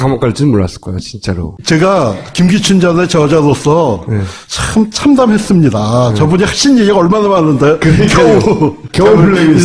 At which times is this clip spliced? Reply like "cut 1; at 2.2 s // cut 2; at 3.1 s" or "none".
none